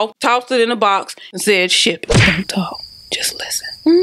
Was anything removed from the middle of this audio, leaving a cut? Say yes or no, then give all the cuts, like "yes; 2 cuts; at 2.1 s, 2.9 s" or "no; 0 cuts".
yes; 1 cut; at 2.0 s